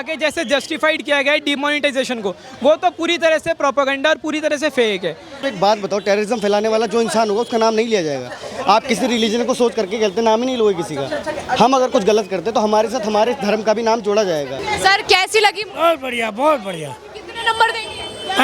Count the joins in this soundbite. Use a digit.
2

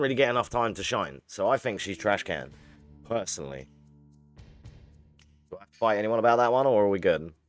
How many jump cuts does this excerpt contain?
0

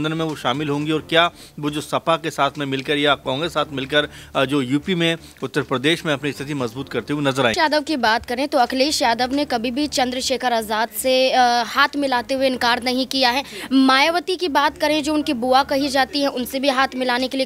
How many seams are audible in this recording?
1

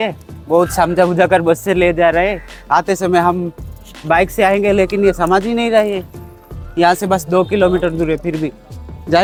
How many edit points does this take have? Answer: 0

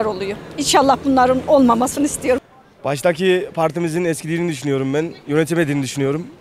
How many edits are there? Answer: 1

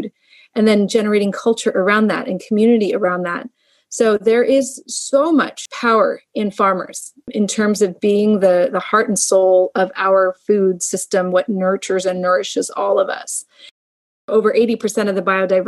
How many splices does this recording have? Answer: 3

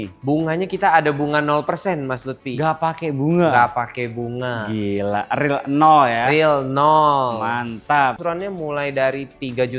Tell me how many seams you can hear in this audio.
1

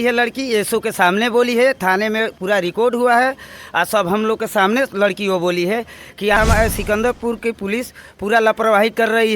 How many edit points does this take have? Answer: 1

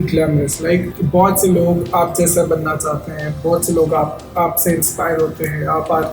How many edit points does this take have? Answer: 1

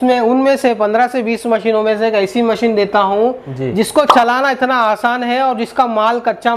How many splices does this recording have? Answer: 0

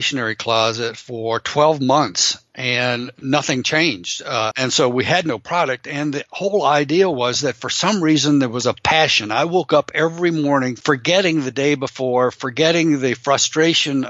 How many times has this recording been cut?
2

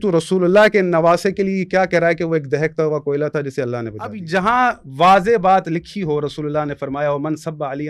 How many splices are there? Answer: 1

